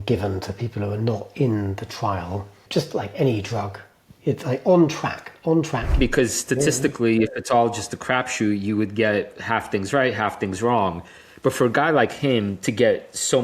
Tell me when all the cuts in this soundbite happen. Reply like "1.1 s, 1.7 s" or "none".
2.6 s, 6.0 s